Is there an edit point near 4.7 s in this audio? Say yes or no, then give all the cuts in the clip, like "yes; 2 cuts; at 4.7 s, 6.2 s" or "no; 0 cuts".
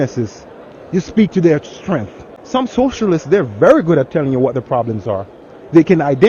no; 1 cut; at 2.3 s